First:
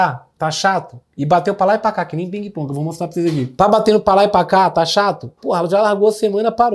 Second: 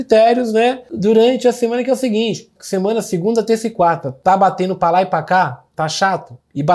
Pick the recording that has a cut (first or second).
second